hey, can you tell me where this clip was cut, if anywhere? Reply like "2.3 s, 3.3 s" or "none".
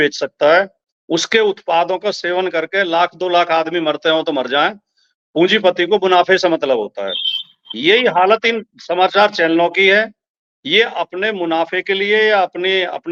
none